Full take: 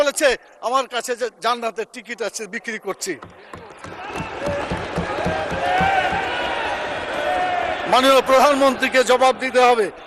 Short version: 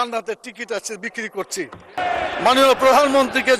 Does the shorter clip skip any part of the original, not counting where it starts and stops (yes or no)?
yes